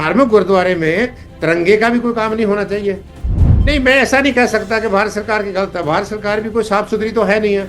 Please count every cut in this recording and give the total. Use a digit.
1